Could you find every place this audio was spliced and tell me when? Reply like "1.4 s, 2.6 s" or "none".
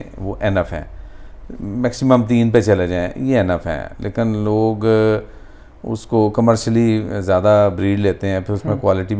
none